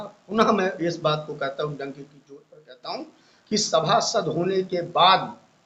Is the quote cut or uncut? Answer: uncut